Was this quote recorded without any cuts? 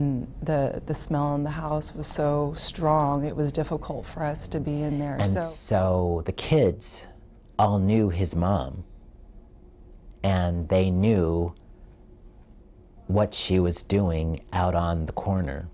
no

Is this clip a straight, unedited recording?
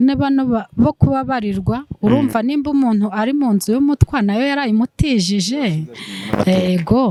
yes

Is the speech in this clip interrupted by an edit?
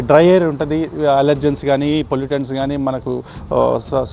no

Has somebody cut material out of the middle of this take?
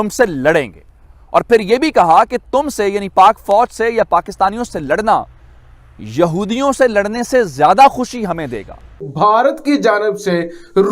yes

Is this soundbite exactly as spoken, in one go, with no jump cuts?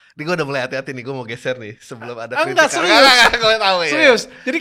yes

